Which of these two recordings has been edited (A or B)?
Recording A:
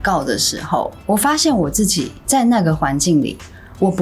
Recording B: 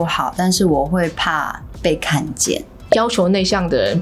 B